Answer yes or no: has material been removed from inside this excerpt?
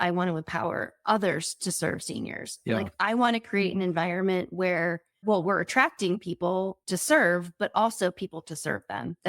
yes